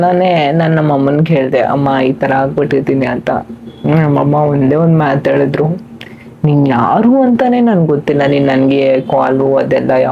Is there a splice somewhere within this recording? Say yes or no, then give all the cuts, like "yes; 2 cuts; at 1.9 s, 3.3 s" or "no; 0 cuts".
no; 0 cuts